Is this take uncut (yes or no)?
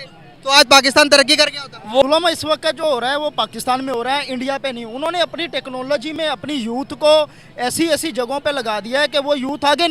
no